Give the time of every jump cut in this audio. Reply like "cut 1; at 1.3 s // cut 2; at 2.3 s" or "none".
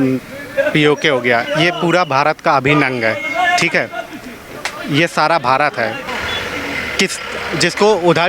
cut 1; at 6.0 s